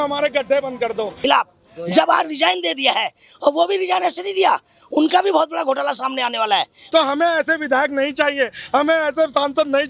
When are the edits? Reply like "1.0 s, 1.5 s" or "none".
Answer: 1.1 s, 6.8 s